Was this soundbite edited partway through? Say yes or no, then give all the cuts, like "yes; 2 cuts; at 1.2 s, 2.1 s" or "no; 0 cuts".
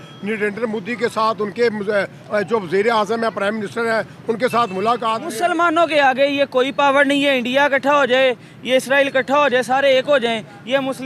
yes; 1 cut; at 5.3 s